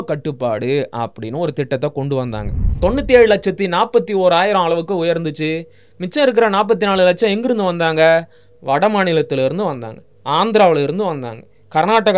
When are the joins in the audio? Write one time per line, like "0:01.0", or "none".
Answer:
0:02.8